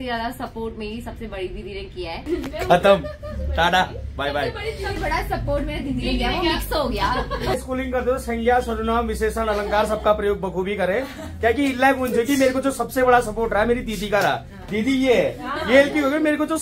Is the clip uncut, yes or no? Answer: no